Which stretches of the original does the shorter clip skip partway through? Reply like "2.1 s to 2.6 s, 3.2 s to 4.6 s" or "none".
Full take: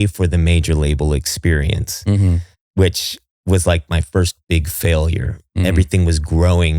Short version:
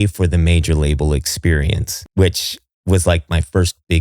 1.9 s to 2.5 s